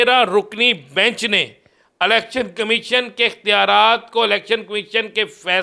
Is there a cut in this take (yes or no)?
no